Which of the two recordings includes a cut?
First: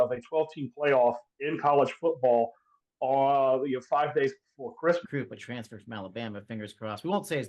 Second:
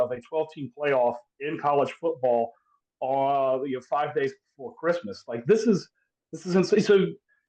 first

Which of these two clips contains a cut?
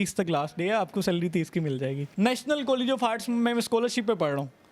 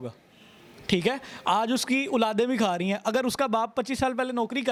first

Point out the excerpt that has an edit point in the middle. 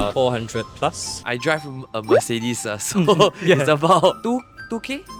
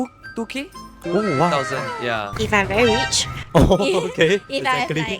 second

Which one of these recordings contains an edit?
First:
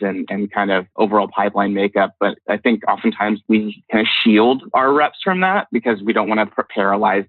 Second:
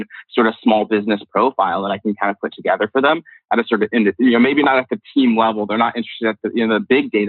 first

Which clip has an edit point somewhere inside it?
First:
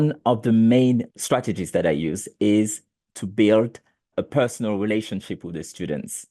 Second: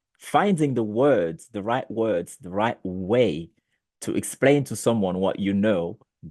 first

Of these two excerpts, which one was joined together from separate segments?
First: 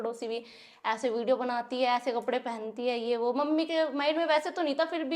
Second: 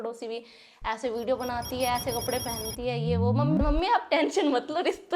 second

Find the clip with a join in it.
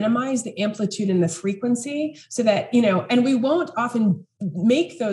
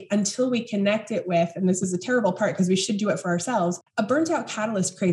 second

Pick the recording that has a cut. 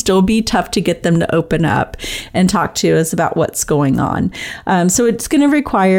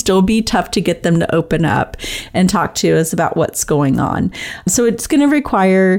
second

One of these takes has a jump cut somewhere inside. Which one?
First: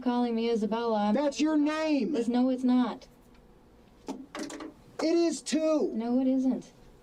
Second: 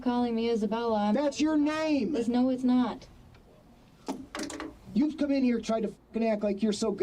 second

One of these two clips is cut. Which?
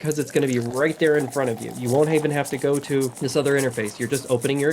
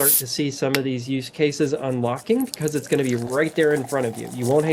first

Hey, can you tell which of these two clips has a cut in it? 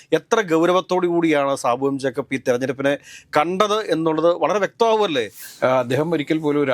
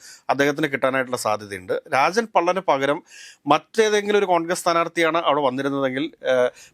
first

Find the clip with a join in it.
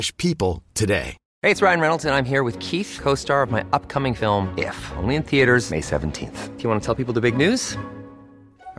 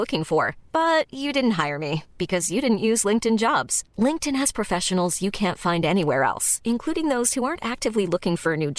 first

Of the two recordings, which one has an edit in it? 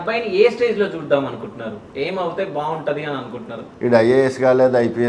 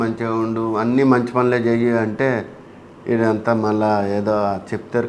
first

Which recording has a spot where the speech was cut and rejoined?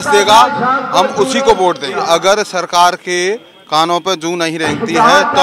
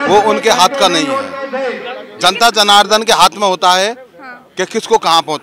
first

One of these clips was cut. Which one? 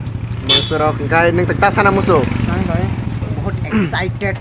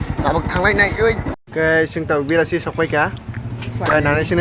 second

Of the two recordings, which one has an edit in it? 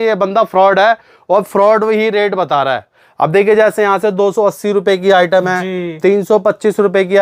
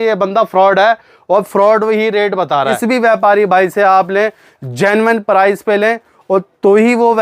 second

